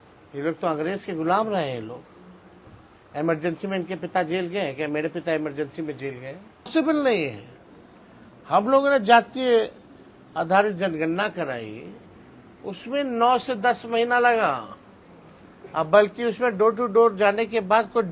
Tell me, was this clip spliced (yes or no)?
yes